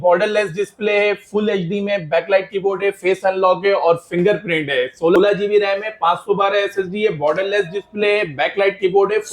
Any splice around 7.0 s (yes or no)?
no